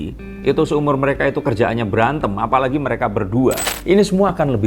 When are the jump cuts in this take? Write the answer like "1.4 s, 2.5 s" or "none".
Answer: 3.6 s